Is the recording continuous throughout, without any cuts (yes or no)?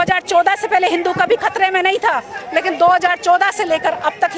yes